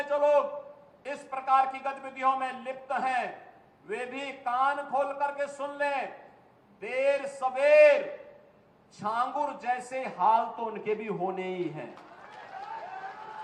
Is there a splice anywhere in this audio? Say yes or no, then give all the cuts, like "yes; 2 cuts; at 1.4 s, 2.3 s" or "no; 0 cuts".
no; 0 cuts